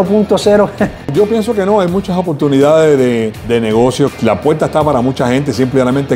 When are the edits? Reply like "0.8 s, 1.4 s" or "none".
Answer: 1.1 s, 3.4 s, 4.1 s